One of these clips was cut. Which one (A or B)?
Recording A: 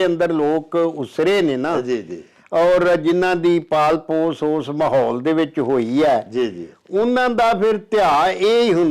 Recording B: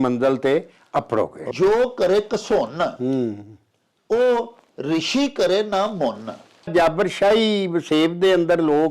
B